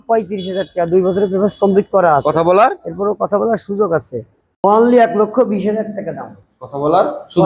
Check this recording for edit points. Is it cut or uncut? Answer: cut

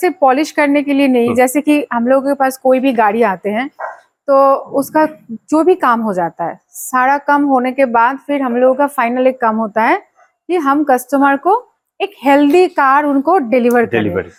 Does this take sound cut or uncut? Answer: uncut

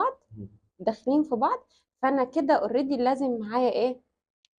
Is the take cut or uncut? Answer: uncut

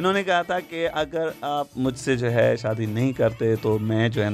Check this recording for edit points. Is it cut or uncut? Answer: uncut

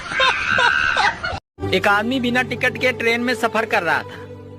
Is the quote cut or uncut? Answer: cut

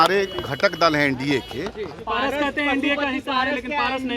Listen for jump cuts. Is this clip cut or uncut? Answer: cut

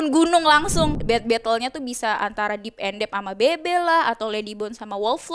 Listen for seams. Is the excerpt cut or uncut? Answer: cut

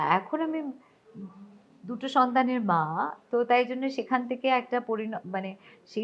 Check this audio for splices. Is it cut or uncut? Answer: uncut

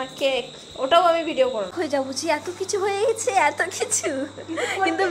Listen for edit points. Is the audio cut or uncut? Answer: cut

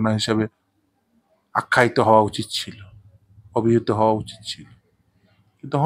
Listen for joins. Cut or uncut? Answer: uncut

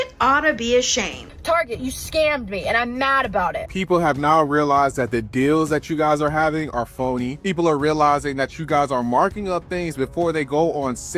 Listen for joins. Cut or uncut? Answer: cut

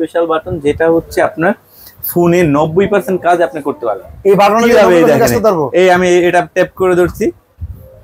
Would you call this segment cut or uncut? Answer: uncut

